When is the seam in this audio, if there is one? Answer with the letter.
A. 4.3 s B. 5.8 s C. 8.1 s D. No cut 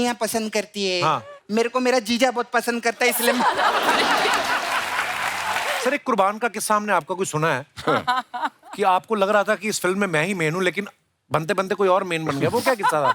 B